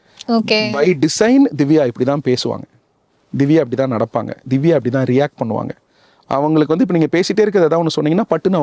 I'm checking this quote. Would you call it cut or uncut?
uncut